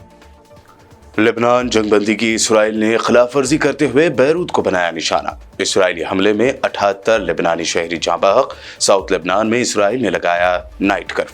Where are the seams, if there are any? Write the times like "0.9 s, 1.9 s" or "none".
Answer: none